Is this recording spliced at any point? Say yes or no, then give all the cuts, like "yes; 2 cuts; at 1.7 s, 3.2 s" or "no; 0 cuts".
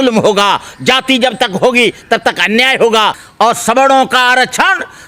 yes; 1 cut; at 3.2 s